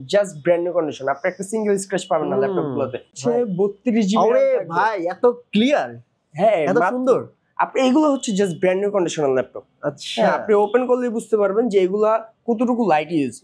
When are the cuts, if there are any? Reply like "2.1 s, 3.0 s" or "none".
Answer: 3.1 s